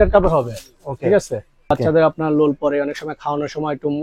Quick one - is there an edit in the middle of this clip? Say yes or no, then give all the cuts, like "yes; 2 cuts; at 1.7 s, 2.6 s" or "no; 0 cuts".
yes; 1 cut; at 1.7 s